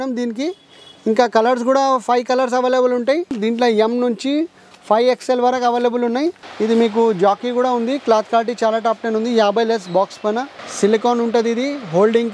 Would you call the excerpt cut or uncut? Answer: cut